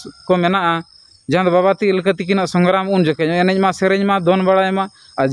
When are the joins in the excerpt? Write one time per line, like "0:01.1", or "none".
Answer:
none